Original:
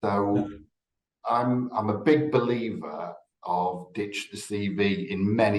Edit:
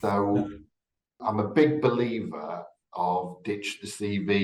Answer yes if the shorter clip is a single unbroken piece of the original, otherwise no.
no